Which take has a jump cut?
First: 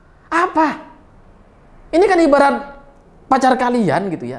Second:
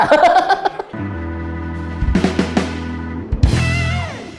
second; 1 cut; at 1.0 s

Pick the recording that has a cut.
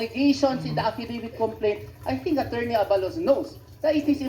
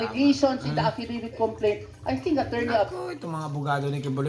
first; 1 cut; at 2.9 s

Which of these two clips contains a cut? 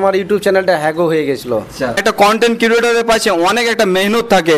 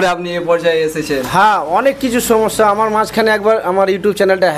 first; 1 cut; at 2.0 s

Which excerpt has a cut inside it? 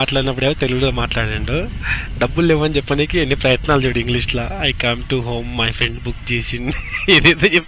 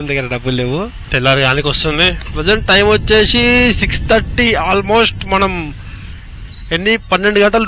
second; 1 cut; at 1.0 s

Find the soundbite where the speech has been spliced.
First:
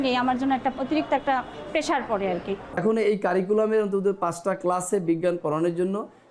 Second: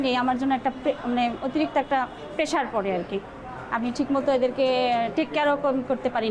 first; 2 cuts; at 0.8 s, 2.7 s

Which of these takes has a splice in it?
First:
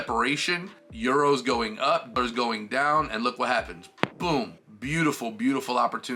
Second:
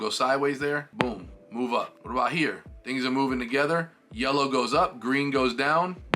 second; 2 cuts; at 0.9 s, 2.0 s

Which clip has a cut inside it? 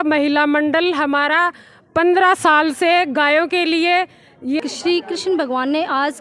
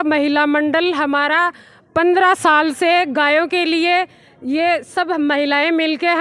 first; 1 cut; at 4.6 s

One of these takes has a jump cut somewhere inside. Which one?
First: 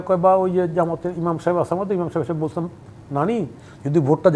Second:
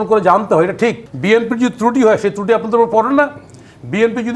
second; 1 cut; at 1.1 s

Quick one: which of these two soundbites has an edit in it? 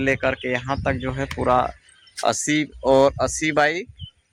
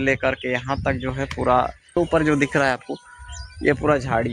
second; 1 cut; at 1.9 s

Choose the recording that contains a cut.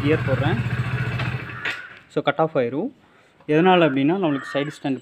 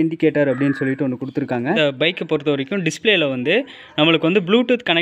second; 1 cut; at 1.8 s

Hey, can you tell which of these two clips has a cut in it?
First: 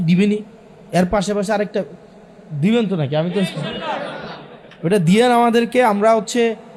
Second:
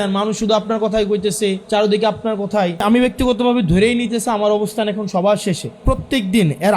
second; 3 cuts; at 1.6 s, 2.8 s, 5.8 s

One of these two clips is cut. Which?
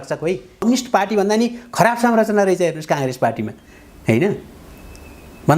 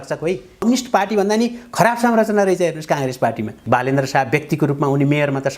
second; 1 cut; at 3.6 s

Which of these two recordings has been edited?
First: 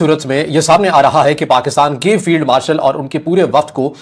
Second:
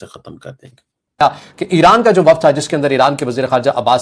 second; 1 cut; at 1.1 s

